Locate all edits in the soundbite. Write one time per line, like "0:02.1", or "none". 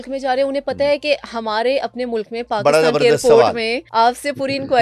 0:03.8